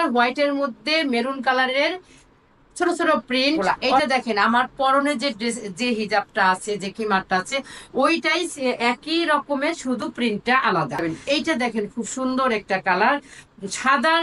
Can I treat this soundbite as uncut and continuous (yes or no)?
no